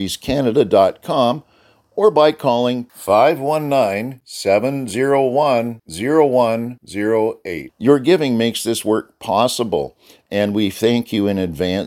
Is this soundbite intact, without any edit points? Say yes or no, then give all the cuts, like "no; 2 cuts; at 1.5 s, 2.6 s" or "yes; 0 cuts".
yes; 0 cuts